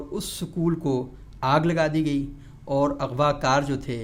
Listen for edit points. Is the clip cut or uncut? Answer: uncut